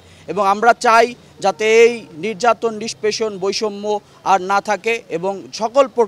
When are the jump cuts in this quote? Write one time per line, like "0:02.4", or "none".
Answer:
none